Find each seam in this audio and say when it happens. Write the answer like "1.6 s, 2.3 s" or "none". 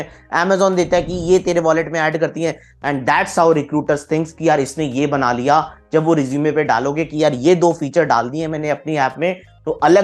2.7 s